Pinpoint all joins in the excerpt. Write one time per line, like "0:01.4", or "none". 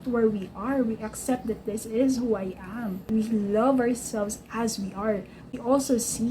0:03.0
0:05.5

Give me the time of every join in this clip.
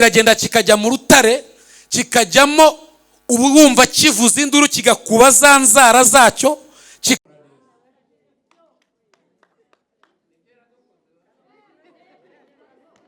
none

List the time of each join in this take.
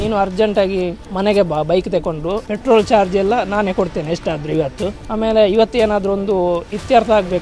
0:01.0
0:02.5
0:05.0

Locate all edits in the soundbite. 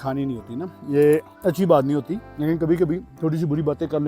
0:01.3
0:02.2
0:03.1

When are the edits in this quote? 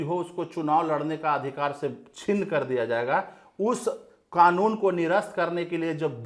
none

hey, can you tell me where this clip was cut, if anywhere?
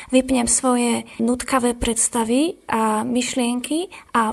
0:01.1

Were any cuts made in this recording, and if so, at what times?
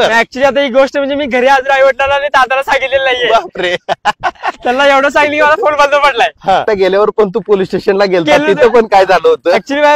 0:06.7

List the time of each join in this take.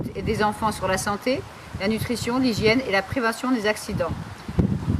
0:01.0

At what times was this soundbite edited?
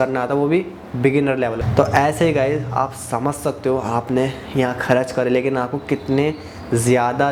none

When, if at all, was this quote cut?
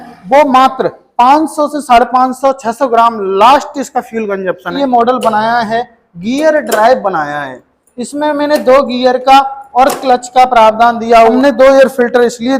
0:04.8
0:11.3

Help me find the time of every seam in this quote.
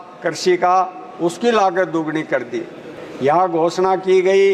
0:02.9

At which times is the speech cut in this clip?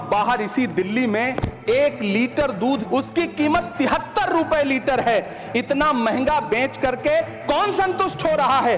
0:02.8

